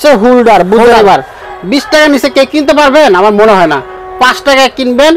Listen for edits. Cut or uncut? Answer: uncut